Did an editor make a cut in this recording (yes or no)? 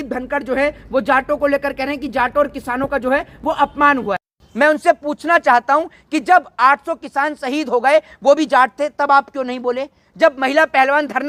no